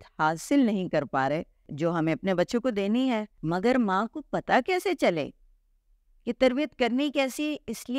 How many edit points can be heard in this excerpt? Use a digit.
2